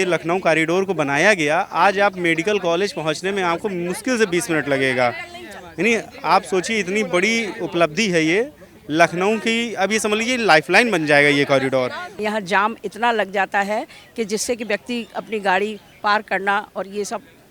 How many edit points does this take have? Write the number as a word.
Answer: one